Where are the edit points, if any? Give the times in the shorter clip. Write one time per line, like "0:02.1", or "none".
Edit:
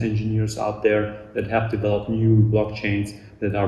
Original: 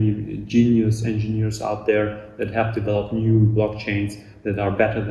none